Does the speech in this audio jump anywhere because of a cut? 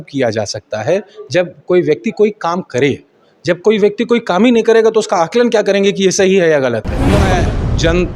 yes; 1 cut; at 7.2 s

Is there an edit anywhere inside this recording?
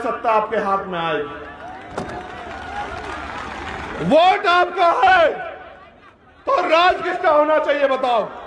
no; 0 cuts

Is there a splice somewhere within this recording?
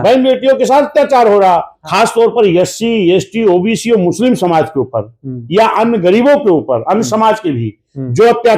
yes; 1 cut; at 1.8 s

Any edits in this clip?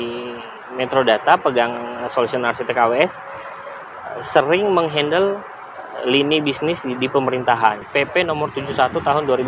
yes; 1 cut; at 7.9 s

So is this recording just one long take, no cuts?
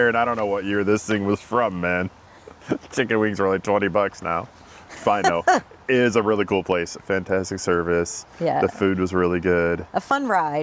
yes; 0 cuts

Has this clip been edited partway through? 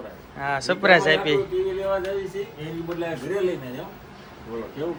no; 0 cuts

